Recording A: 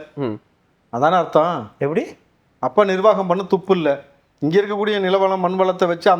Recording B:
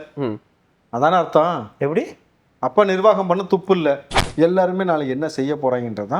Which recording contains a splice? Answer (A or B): B